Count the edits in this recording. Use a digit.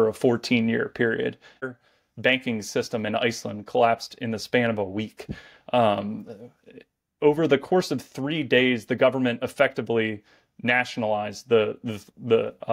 1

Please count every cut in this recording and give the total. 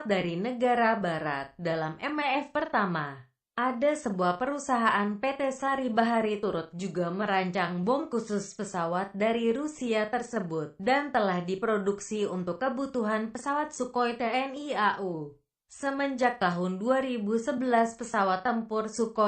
1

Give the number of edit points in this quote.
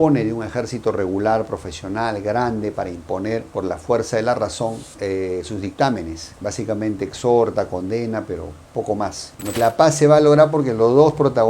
1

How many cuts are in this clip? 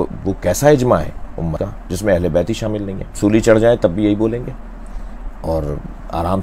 2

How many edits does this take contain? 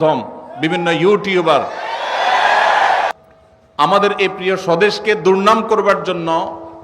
1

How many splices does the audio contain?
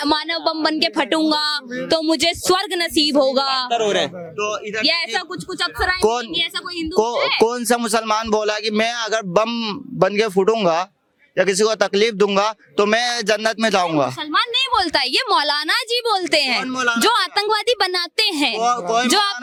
0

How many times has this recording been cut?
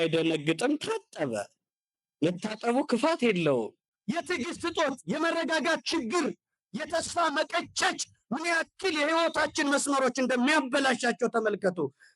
1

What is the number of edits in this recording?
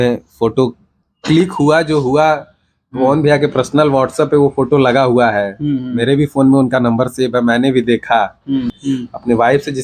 1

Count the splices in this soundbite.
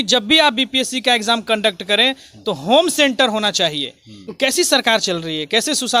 1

